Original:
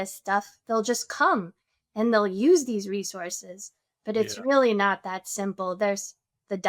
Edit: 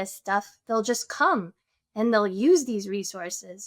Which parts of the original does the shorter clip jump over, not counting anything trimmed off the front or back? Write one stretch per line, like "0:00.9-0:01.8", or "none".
none